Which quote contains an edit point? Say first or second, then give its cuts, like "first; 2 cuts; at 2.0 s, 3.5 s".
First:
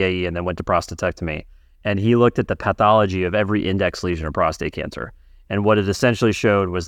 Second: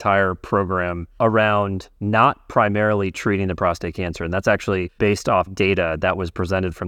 second; 2 cuts; at 1.0 s, 4.9 s